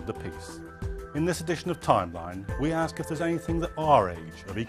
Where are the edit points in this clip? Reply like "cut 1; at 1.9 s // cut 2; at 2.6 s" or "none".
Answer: cut 1; at 1.2 s